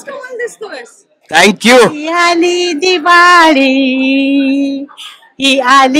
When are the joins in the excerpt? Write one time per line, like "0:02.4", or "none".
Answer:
0:02.1